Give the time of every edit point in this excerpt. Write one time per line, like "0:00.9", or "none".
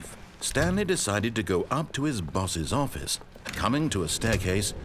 0:03.5